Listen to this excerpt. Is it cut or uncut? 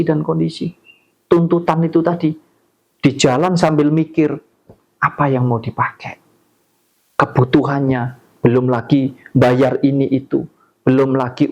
uncut